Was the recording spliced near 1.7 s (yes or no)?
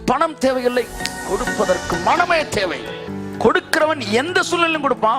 no